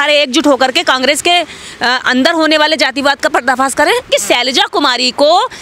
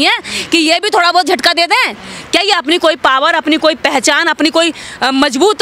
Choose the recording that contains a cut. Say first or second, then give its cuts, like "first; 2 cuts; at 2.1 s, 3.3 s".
first; 1 cut; at 4.1 s